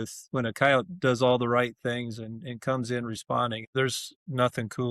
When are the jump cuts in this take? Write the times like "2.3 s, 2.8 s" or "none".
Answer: 3.7 s